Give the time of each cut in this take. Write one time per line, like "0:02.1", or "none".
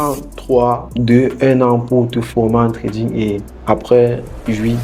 0:03.5